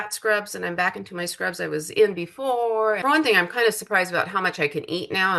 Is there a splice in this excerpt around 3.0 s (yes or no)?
yes